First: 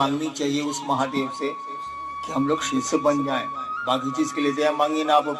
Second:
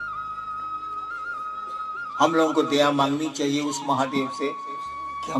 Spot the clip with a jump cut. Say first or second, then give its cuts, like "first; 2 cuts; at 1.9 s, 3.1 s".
second; 2 cuts; at 1.0 s, 2.1 s